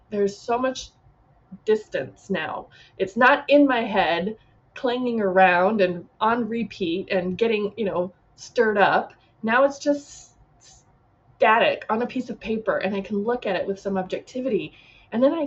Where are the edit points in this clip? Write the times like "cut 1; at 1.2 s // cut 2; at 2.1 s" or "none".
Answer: none